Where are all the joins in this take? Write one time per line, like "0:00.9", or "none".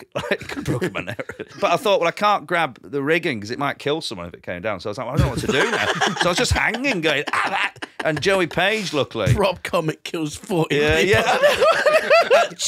0:01.5
0:02.8
0:03.8